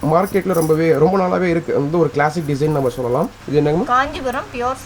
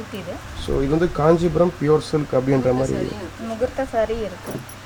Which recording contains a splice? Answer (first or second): first